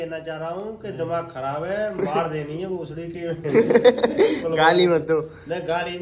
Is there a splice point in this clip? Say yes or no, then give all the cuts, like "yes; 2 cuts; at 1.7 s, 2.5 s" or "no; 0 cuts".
no; 0 cuts